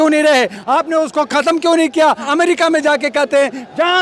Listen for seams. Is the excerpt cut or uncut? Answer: cut